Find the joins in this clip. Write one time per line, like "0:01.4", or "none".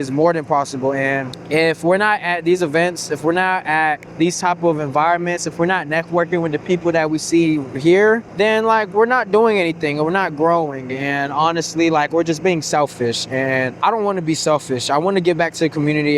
0:01.3
0:04.1
0:08.3
0:13.7